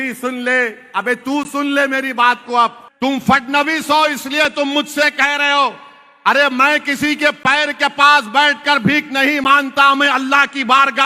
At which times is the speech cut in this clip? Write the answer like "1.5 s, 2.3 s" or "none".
2.8 s